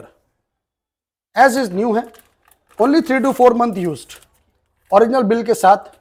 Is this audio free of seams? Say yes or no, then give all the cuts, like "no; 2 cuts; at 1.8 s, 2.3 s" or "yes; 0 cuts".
yes; 0 cuts